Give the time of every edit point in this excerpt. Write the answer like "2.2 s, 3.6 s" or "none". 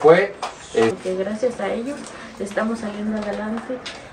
1.0 s